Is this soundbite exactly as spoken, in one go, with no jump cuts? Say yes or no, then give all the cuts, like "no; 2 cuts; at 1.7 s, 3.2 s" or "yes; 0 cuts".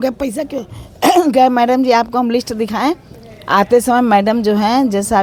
yes; 0 cuts